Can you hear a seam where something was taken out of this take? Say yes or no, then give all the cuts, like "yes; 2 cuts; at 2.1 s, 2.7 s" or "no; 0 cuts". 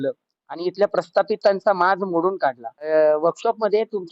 yes; 1 cut; at 2.9 s